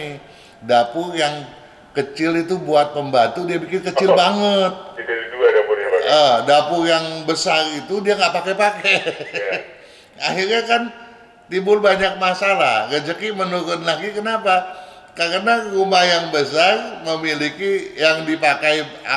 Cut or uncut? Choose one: uncut